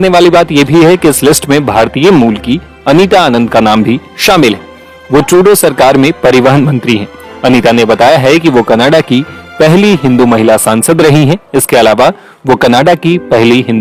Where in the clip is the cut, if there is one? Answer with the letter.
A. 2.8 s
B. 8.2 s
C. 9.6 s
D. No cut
D